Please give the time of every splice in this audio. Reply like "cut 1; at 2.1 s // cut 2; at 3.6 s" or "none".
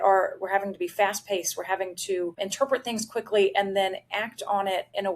cut 1; at 2.4 s